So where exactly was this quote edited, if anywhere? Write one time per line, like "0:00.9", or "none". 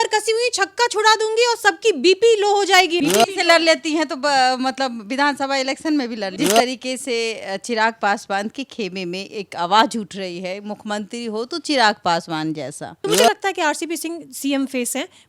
0:03.0
0:06.3
0:12.9